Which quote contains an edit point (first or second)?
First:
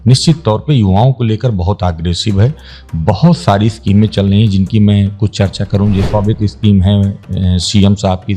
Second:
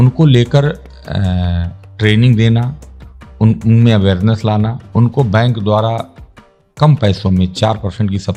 first